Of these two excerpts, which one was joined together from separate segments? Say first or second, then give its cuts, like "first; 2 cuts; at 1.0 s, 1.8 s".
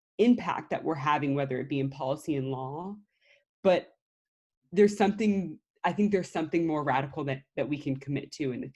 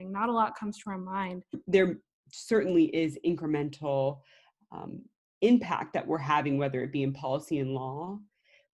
second; 1 cut; at 1.6 s